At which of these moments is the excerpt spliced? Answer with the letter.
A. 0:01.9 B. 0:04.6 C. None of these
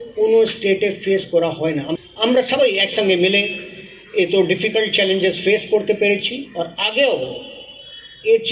A